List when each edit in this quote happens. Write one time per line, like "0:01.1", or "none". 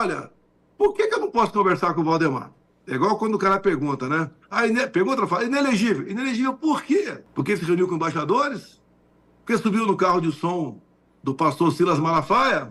none